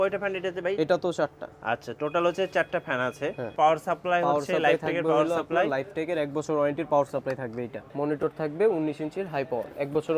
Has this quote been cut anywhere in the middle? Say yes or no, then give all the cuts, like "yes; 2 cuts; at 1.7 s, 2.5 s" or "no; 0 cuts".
yes; 2 cuts; at 3.5 s, 7.8 s